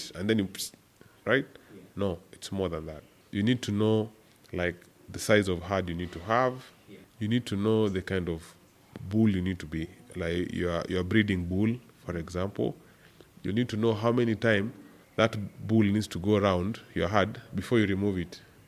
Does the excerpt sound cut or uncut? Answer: uncut